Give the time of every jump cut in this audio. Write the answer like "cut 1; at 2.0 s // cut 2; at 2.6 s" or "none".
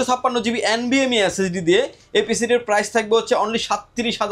none

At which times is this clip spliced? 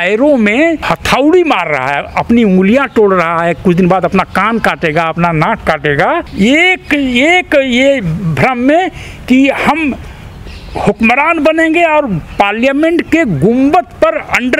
cut 1; at 0.8 s // cut 2; at 6.3 s

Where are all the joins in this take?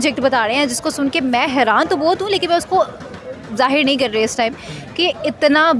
none

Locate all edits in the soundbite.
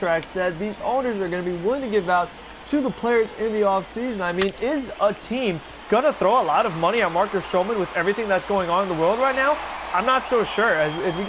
none

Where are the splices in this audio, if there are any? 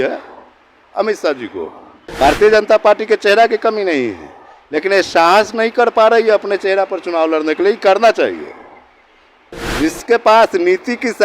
cut 1; at 2.0 s

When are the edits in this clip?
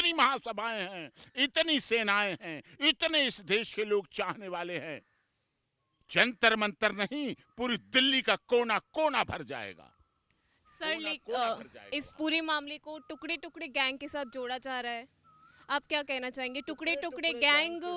none

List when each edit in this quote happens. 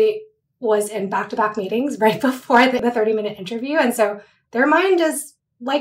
cut 1; at 2.8 s

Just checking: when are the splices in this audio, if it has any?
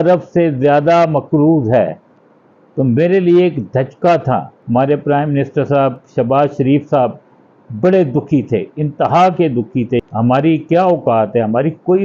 cut 1; at 4.5 s // cut 2; at 10.0 s

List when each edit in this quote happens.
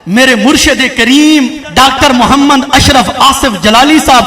cut 1; at 1.6 s

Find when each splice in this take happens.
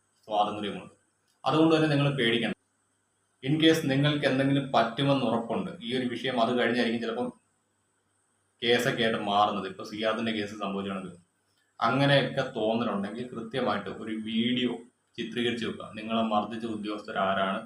cut 1; at 2.5 s

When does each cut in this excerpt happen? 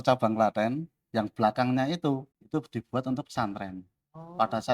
cut 1; at 2.4 s

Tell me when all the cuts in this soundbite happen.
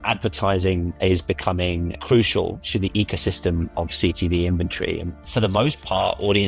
cut 1; at 2.0 s // cut 2; at 5.1 s

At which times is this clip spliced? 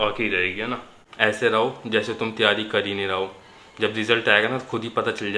cut 1; at 1.0 s

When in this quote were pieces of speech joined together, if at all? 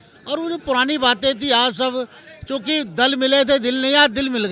none

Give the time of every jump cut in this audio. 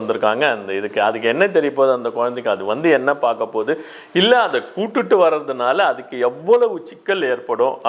none

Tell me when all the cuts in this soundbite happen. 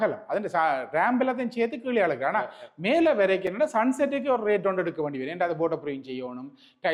none

